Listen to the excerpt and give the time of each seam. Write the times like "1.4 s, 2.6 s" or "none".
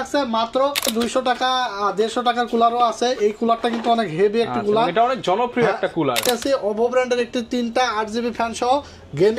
0.9 s, 6.2 s